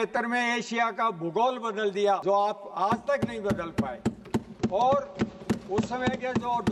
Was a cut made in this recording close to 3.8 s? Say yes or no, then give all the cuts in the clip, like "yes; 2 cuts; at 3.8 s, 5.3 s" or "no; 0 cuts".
no; 1 cut; at 2.2 s